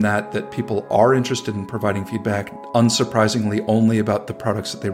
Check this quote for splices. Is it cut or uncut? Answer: uncut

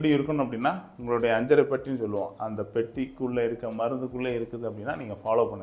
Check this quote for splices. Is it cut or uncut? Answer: uncut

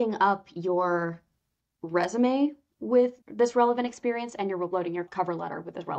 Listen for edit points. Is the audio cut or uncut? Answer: cut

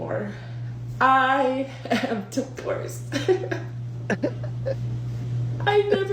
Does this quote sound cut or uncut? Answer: uncut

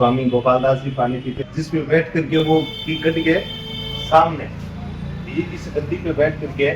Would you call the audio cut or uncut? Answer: uncut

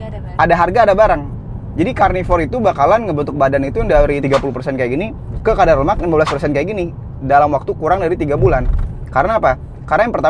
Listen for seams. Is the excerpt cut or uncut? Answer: uncut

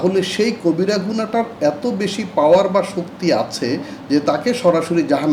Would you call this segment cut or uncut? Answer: uncut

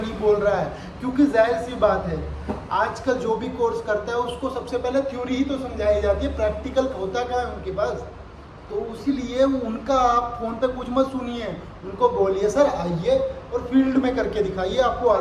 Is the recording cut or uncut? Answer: uncut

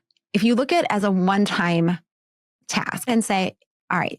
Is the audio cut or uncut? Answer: cut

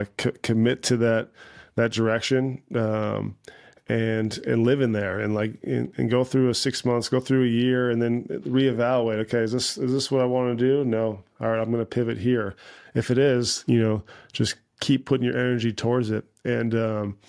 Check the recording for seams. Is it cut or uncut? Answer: uncut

